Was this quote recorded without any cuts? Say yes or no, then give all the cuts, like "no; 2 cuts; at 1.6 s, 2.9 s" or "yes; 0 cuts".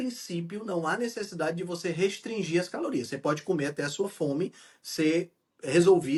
yes; 0 cuts